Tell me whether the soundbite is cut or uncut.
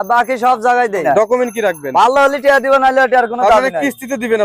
cut